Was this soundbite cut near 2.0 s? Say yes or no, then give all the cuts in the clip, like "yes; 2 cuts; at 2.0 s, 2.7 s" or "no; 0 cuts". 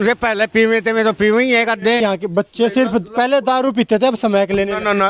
yes; 1 cut; at 2.0 s